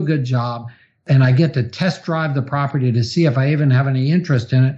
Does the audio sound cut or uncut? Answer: cut